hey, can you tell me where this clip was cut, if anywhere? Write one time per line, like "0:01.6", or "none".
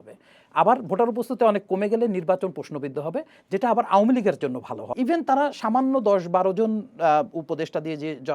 0:04.9